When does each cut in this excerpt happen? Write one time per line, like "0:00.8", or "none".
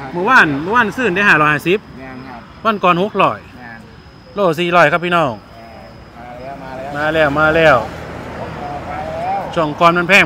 none